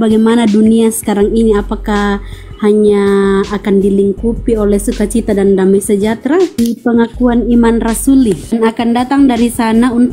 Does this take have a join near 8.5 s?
yes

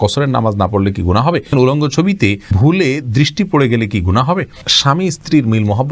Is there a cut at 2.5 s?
yes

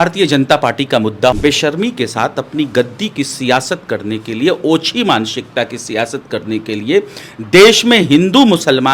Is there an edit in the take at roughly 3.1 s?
no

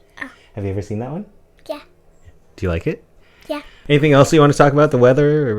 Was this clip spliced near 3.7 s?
yes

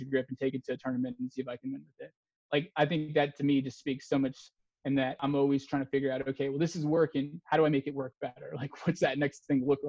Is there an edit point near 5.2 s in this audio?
yes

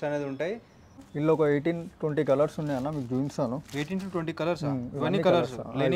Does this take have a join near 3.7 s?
no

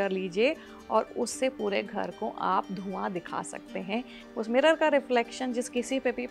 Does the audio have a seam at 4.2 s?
yes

